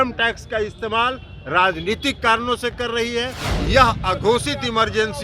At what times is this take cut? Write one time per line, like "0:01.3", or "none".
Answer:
0:03.4

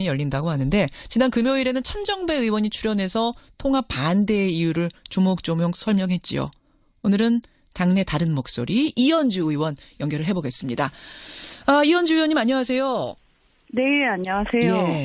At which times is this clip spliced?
0:07.7

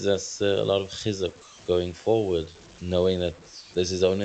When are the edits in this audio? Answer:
none

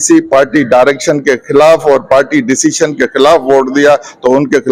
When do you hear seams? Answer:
none

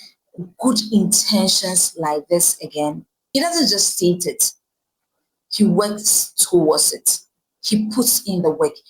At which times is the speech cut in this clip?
0:03.1

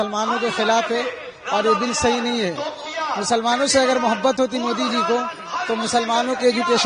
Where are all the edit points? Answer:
none

